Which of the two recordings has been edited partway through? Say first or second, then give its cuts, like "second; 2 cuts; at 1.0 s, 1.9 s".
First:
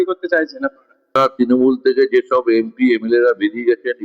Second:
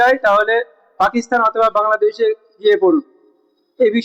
first; 1 cut; at 1.2 s